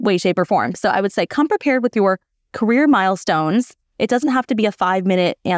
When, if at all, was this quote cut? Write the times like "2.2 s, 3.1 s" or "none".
none